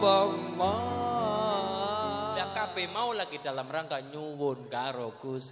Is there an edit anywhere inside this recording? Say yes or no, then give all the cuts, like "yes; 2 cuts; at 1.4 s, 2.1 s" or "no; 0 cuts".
yes; 1 cut; at 2.5 s